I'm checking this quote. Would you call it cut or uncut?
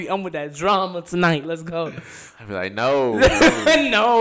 uncut